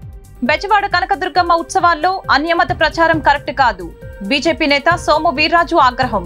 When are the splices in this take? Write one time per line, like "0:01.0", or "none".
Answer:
none